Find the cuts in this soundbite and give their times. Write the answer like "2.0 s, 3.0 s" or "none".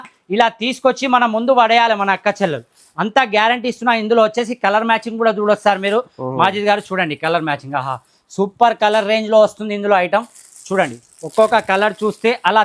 none

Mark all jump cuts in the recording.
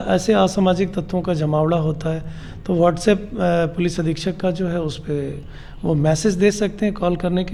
none

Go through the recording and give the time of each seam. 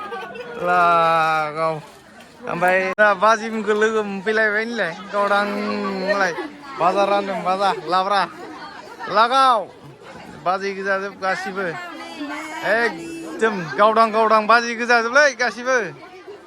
2.9 s

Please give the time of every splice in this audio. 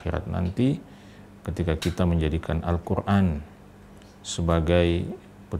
none

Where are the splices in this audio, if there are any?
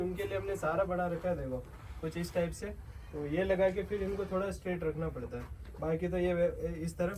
none

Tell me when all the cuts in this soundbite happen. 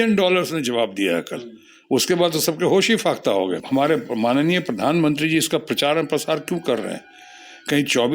3.6 s

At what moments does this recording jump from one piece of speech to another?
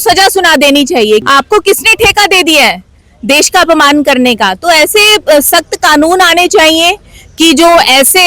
1.2 s

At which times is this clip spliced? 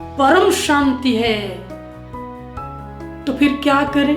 1.6 s, 3.0 s

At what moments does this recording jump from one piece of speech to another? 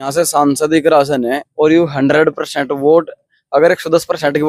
none

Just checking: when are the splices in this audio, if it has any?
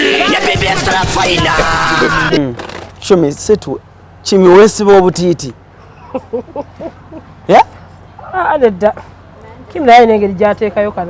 none

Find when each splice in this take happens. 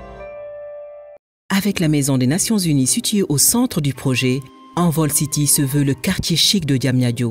1.1 s

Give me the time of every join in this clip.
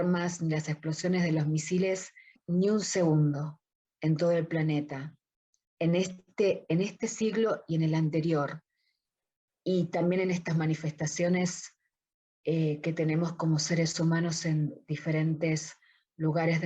2.4 s

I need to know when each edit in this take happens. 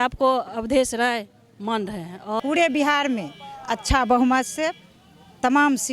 2.4 s

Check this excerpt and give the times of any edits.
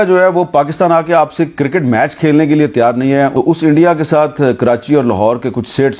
3.3 s

